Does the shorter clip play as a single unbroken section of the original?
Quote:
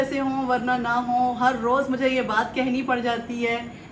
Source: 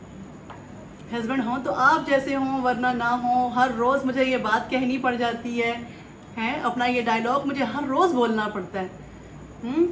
yes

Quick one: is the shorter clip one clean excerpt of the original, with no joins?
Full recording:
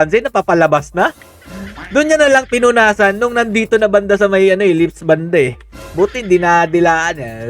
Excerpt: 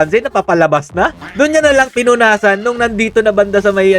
no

